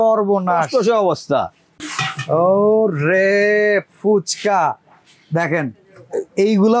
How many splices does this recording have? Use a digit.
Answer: 1